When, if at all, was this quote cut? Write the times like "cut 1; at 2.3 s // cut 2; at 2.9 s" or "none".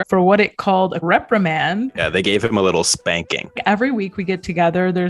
cut 1; at 1.0 s // cut 2; at 1.9 s // cut 3; at 3.6 s